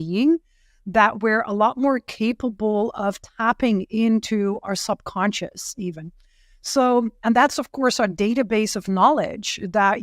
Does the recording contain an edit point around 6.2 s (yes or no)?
no